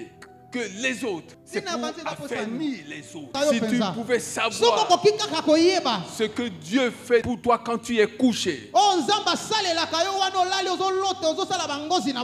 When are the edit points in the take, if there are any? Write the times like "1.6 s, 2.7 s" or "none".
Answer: 1.4 s, 3.3 s